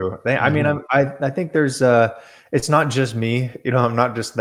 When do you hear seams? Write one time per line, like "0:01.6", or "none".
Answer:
none